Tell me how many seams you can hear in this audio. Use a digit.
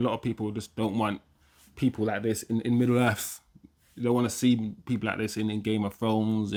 0